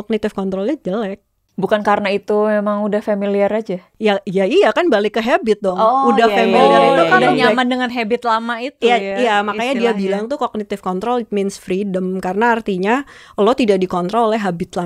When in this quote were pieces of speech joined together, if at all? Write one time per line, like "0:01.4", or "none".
none